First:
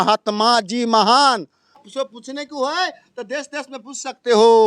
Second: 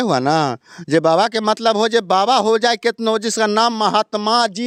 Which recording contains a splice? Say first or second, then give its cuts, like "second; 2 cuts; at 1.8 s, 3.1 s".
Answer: first; 1 cut; at 1.8 s